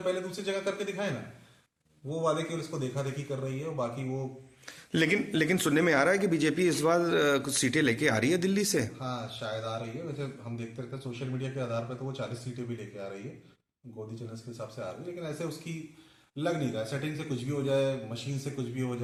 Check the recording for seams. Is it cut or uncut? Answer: uncut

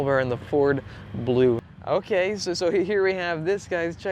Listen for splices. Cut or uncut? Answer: cut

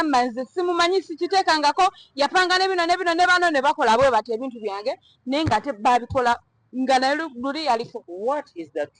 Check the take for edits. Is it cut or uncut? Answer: cut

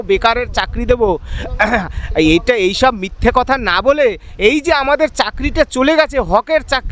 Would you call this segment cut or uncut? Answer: uncut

